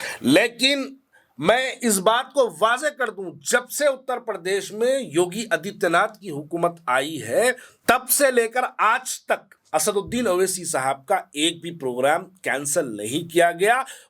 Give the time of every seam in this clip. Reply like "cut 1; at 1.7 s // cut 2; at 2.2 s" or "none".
cut 1; at 7.7 s // cut 2; at 9.5 s